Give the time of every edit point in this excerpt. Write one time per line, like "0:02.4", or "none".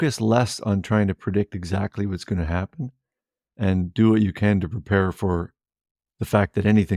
none